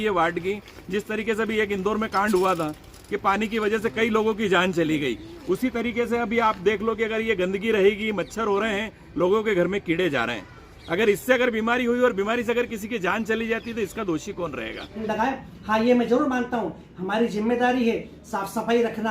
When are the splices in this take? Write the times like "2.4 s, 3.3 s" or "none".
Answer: 15.0 s